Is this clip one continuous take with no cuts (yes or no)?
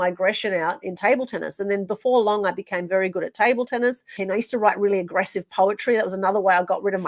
no